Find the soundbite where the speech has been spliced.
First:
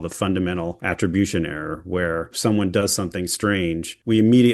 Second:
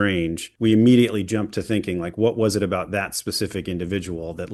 first; 1 cut; at 2.3 s

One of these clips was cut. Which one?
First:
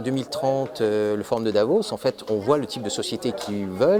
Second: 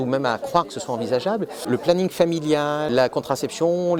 second; 2 cuts; at 1.7 s, 2.9 s

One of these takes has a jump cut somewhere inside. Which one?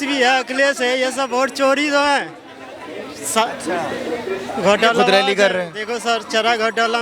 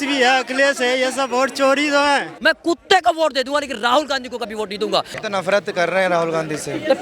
second; 2 cuts; at 2.3 s, 5.2 s

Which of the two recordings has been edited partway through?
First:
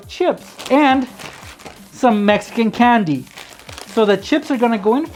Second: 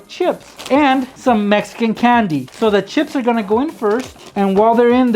second; 3 cuts; at 1.1 s, 2.5 s, 4.2 s

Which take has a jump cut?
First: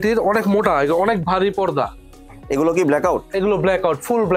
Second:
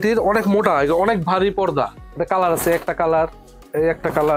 second; 1 cut; at 2.1 s

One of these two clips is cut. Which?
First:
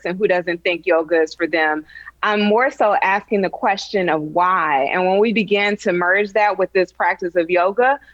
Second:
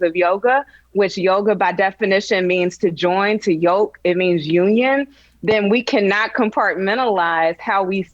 second; 1 cut; at 2.0 s

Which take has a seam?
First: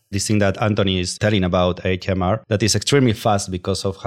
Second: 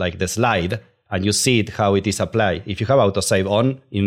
first; 2 cuts; at 1.1 s, 2.4 s

